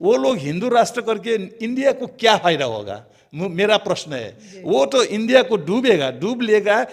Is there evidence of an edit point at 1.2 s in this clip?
no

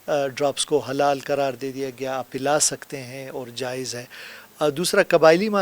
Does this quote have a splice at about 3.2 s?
no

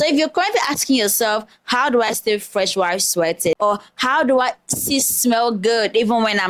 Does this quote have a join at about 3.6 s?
yes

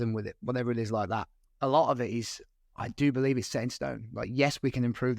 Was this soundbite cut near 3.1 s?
no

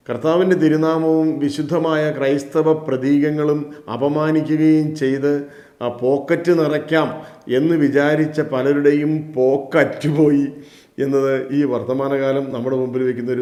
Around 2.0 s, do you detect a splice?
no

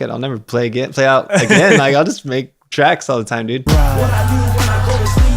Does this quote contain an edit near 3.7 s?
yes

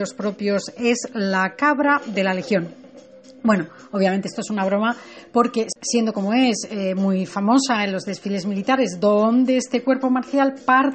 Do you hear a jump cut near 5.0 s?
yes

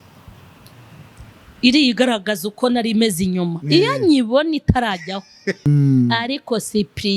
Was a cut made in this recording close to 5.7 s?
yes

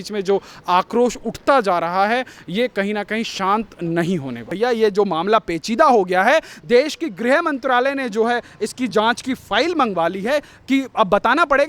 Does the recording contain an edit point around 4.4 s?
yes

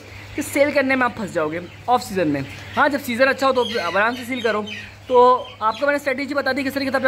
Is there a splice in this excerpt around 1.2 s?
no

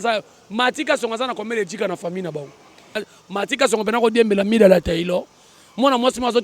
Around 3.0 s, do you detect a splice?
yes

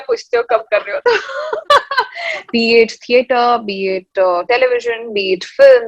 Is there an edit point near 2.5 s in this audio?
yes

